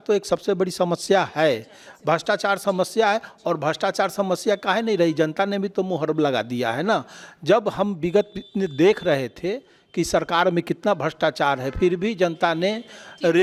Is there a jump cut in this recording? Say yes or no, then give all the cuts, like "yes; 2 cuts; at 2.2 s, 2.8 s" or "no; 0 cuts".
no; 0 cuts